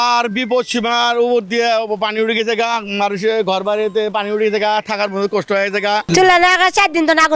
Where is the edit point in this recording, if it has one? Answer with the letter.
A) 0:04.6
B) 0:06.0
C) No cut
B